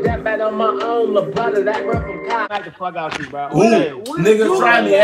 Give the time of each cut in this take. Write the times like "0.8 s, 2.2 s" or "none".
2.6 s